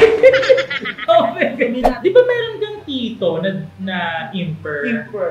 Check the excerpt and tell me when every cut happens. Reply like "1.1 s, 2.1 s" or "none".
1.9 s